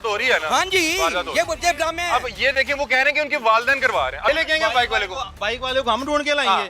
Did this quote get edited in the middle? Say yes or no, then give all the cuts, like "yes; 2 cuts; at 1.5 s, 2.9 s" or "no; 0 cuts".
yes; 1 cut; at 4.3 s